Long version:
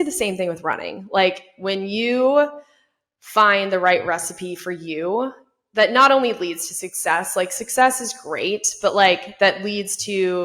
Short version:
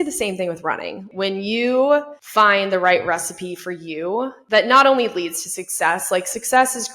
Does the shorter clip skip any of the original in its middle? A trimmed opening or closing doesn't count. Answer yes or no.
yes